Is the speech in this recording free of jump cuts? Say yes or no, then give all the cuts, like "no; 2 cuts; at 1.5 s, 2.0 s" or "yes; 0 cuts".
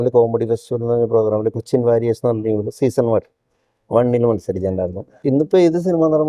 no; 1 cut; at 5.1 s